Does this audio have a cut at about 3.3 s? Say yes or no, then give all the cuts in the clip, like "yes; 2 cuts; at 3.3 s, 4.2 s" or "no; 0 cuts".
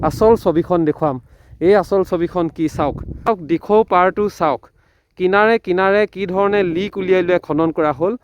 yes; 1 cut; at 3.3 s